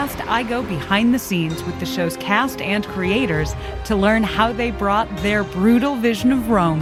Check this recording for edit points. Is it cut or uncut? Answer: uncut